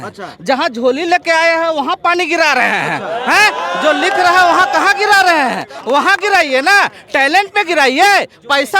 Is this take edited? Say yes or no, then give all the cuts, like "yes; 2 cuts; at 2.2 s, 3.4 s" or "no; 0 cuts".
no; 0 cuts